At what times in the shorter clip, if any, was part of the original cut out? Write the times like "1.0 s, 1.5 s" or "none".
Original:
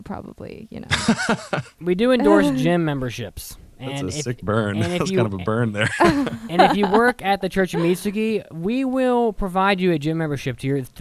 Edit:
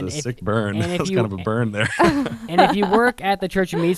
none

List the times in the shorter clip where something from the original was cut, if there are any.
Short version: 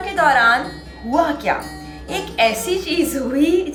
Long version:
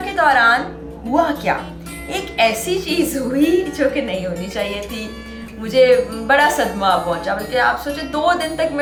none

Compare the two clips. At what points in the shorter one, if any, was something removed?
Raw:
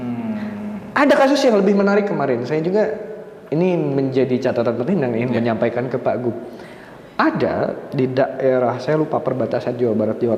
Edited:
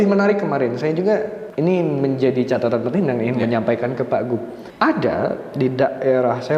1.4 s, 4.6 s

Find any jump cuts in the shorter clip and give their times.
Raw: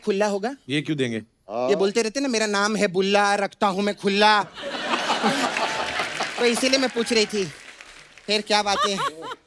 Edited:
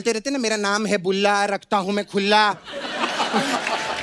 none

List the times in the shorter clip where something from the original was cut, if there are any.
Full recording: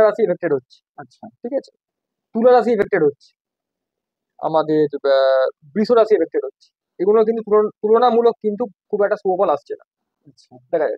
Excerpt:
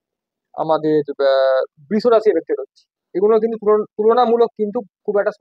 none

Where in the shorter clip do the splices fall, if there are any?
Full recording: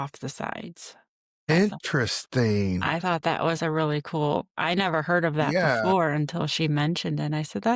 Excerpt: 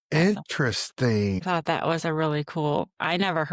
1.4 s

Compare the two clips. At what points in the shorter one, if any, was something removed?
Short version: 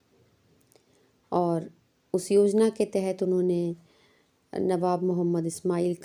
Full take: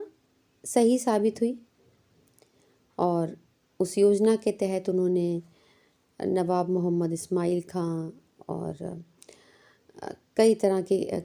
none

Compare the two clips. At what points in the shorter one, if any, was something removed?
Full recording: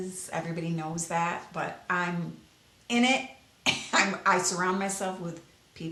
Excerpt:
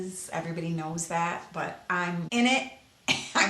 2.3 s

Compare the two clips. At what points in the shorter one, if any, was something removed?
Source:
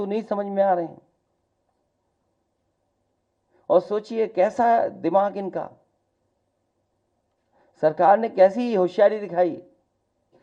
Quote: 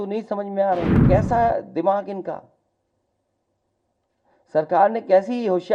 1.0 s

